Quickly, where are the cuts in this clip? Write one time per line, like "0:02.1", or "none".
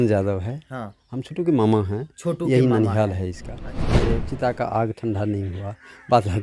0:03.8

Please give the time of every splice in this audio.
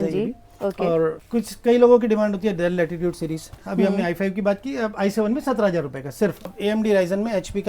0:01.2
0:03.6
0:06.4

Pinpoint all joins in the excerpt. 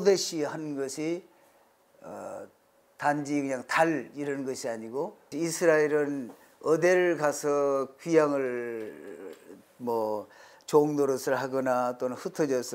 0:05.2

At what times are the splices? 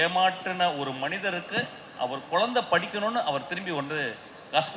none

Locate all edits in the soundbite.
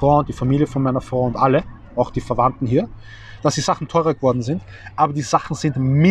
none

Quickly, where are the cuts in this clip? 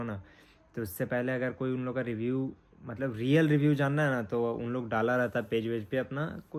none

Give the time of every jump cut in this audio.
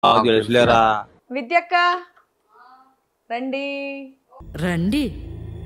0:01.2

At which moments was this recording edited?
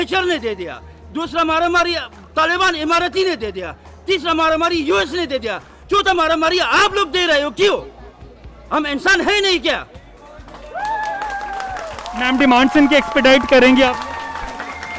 none

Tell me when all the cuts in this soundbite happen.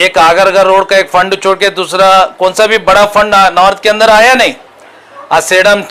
none

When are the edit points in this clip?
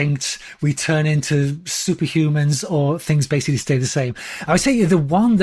none

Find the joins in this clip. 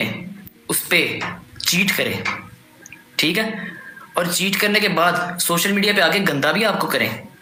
none

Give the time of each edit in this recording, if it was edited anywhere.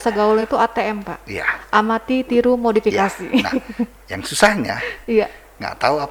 none

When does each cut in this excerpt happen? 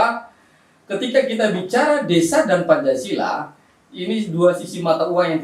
none

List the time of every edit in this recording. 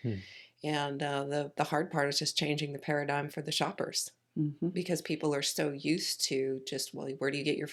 none

